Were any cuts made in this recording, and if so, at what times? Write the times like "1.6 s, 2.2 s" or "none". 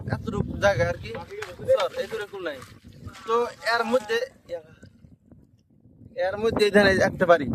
none